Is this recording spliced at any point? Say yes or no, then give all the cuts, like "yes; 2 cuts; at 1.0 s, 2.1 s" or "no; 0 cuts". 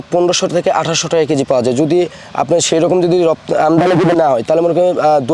no; 0 cuts